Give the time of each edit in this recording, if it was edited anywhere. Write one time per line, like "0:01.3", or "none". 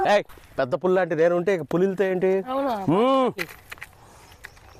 none